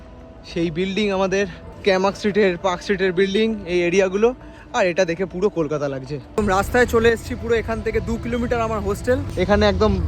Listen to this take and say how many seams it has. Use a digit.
3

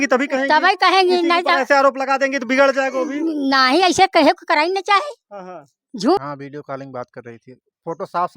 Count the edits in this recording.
1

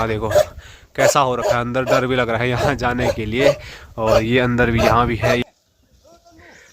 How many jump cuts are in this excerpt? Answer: 1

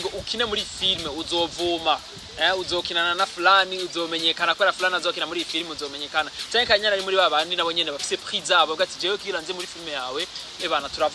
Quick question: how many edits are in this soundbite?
0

